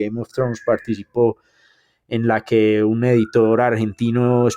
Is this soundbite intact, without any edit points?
yes; 0 cuts

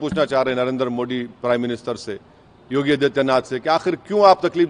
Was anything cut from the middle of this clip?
no; 0 cuts

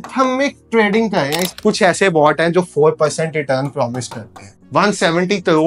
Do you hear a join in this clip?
yes; 2 cuts; at 1.5 s, 4.6 s

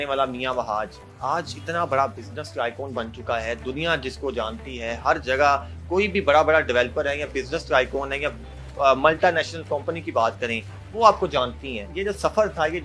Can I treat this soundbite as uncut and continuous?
yes; 0 cuts

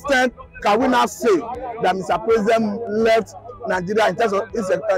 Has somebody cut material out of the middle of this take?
no; 0 cuts

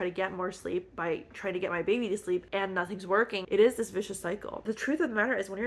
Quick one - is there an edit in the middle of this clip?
yes; 2 cuts; at 3.4 s, 4.6 s

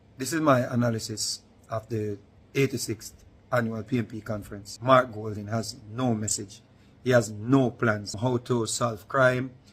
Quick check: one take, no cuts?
no; 2 cuts; at 4.7 s, 8.2 s

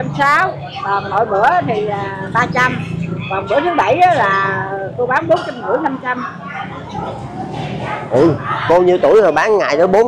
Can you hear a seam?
no; 0 cuts

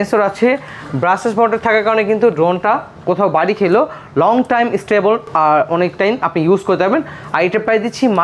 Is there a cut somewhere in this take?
no; 0 cuts

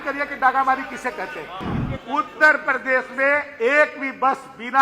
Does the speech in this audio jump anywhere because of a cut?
yes; 1 cut; at 1.6 s

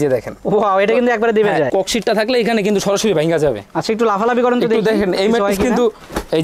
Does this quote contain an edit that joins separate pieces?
yes; 1 cut; at 1.7 s

